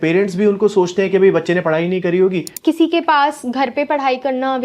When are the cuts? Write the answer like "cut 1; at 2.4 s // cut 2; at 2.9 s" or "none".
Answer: cut 1; at 2.5 s